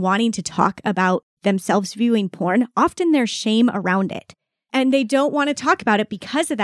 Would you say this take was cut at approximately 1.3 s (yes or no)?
yes